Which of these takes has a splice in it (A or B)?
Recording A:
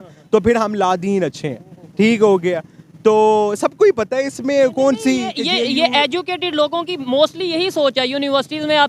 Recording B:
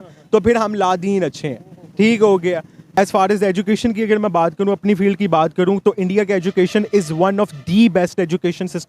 B